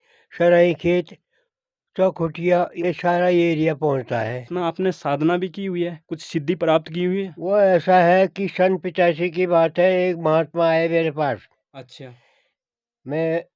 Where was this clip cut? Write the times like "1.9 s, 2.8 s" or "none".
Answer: 4.5 s